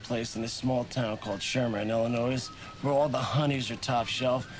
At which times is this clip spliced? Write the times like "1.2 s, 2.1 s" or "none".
none